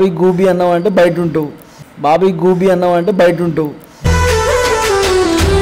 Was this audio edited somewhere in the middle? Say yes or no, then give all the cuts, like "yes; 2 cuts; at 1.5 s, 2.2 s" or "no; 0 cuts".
no; 0 cuts